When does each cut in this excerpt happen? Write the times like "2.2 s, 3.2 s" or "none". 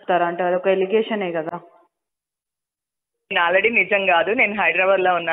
none